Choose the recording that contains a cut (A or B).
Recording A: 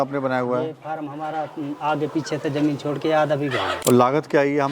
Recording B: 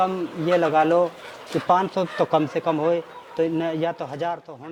A